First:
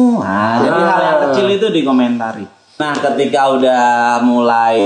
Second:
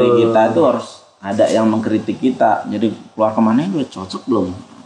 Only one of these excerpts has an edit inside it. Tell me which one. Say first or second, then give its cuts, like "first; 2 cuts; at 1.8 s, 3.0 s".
first; 1 cut; at 2.9 s